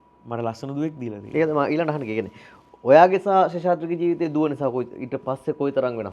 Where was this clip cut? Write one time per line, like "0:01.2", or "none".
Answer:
none